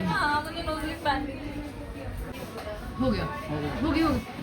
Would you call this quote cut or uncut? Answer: cut